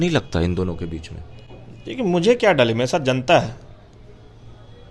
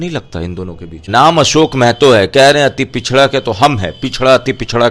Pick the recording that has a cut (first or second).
second